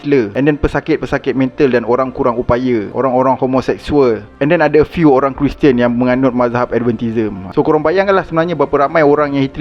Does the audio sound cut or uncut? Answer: uncut